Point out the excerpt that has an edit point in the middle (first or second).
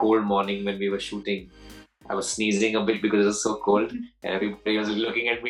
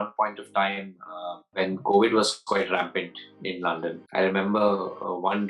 second